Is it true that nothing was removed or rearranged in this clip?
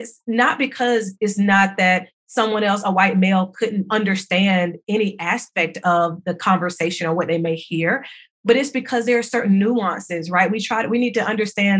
no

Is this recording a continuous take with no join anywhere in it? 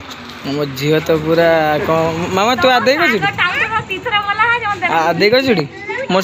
yes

